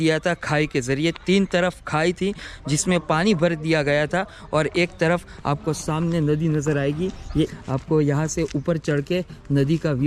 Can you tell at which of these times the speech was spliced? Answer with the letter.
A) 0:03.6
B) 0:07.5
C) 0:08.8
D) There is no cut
B